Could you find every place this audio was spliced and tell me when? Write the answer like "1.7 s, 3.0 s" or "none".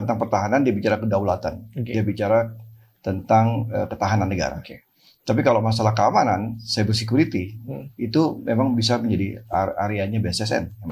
none